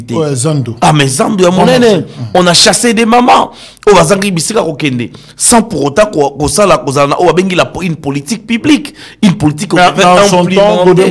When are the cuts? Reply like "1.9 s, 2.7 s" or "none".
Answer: none